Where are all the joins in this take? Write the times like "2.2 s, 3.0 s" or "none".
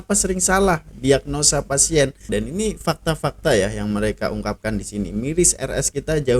2.2 s